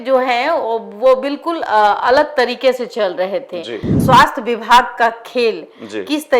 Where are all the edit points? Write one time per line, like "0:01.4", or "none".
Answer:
0:03.9